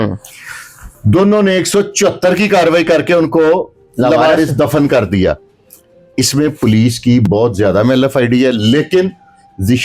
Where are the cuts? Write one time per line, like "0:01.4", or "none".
none